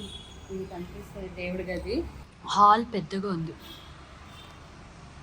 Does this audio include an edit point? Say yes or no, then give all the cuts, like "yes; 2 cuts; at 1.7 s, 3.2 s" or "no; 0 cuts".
yes; 1 cut; at 2.3 s